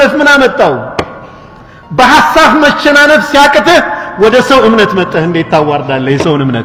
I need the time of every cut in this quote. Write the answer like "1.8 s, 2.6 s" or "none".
none